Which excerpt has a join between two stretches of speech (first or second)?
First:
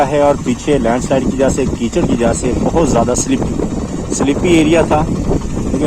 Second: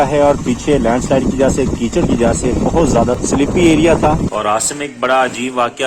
second